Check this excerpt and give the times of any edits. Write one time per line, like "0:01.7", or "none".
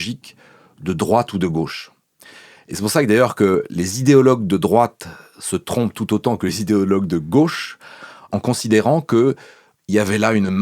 0:08.3

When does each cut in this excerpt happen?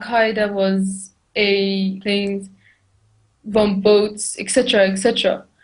none

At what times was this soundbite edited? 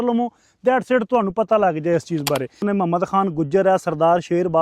0:02.6

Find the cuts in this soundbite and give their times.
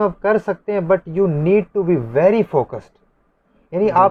none

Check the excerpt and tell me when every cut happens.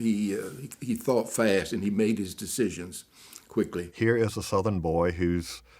0:03.9

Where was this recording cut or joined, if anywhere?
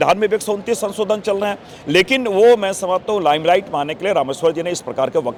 none

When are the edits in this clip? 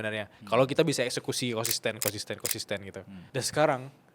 0:03.1

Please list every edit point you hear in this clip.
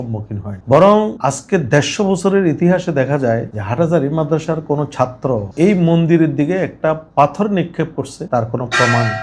none

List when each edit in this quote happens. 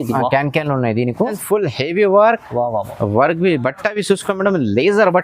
0:01.4

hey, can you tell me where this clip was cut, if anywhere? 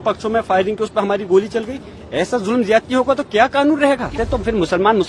0:04.2

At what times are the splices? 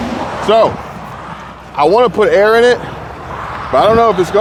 none

